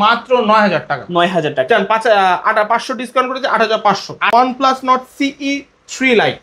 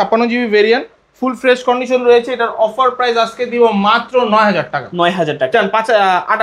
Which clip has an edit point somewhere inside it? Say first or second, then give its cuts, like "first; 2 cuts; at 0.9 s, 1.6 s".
first; 1 cut; at 4.3 s